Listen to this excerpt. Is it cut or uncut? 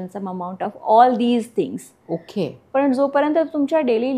uncut